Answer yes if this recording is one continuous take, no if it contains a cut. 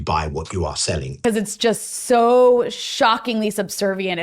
no